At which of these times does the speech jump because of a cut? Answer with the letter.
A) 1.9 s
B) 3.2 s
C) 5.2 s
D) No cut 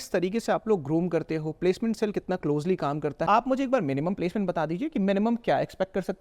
B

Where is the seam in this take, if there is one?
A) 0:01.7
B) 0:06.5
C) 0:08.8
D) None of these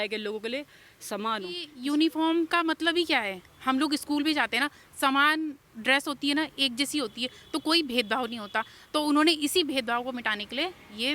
A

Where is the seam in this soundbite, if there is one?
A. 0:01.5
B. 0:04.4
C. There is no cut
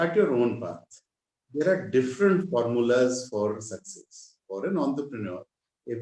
B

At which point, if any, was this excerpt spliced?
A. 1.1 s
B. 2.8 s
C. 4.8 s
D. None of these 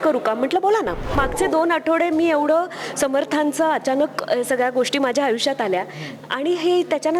A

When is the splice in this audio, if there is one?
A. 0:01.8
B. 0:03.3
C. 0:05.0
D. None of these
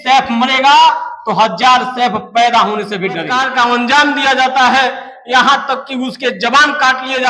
B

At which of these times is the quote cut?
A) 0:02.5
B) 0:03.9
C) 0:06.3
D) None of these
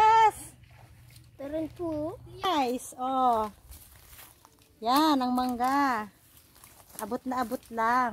A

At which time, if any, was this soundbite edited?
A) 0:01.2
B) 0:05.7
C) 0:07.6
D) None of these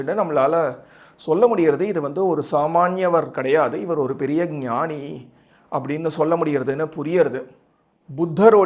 D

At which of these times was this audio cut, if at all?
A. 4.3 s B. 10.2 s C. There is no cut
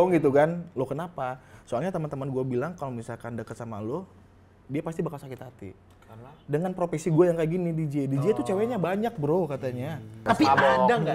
B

